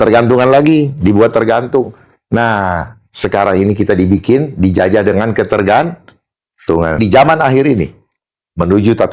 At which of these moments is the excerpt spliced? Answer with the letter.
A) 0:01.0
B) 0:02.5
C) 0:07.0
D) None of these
C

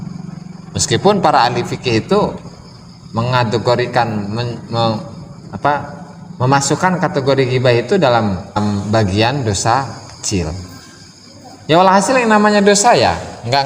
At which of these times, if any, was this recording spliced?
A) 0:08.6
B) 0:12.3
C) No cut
A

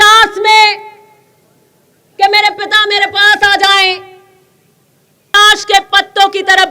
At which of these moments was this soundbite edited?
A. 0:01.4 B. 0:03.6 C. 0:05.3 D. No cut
C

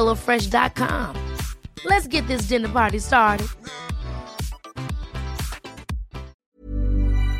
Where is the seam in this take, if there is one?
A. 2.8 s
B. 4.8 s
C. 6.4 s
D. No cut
C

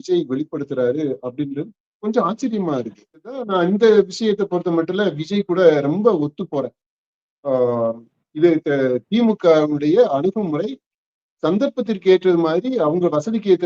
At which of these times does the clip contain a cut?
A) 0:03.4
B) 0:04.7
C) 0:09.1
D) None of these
A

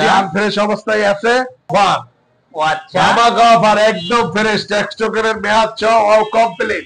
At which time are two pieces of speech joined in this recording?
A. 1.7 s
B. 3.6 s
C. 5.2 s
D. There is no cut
A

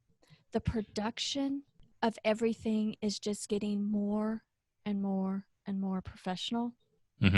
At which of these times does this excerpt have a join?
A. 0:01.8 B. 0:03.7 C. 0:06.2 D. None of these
A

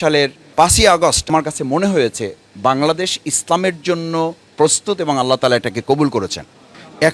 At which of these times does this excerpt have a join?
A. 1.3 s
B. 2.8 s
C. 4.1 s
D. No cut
A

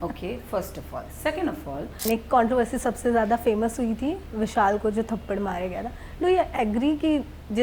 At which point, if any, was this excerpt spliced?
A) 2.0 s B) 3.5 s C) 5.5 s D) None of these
A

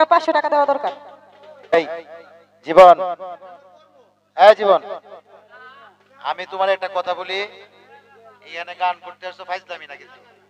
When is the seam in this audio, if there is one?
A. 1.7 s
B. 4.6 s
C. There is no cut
A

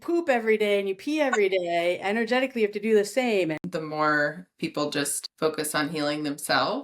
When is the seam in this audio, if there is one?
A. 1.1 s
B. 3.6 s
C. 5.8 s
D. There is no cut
B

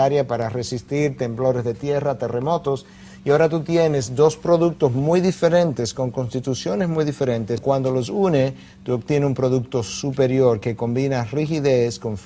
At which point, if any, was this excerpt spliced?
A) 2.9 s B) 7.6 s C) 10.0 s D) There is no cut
B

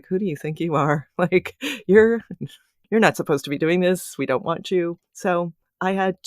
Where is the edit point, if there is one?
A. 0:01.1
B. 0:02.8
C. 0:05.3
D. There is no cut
C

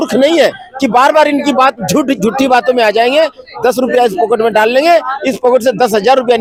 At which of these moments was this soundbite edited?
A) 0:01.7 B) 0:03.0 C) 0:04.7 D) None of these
D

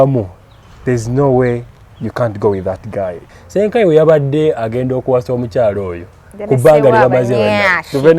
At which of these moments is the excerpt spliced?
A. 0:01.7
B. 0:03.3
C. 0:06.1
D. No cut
B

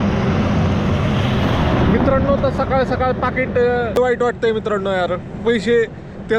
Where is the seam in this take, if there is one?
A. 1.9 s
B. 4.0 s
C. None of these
B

